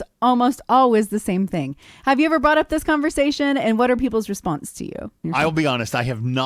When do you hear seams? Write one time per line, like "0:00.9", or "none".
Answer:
0:05.2